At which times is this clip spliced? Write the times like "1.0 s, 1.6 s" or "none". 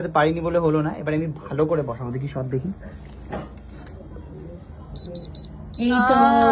none